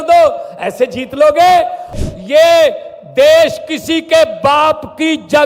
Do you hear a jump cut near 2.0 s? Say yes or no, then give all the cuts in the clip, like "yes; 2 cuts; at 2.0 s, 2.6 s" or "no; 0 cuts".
yes; 1 cut; at 2.0 s